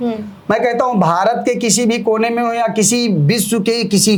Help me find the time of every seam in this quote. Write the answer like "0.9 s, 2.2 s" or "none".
none